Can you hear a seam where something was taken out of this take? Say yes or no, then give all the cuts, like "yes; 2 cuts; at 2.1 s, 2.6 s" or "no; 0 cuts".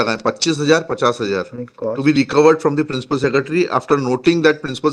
no; 0 cuts